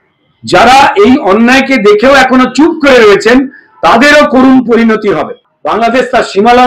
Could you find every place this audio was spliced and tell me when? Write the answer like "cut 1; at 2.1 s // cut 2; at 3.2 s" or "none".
cut 1; at 5.5 s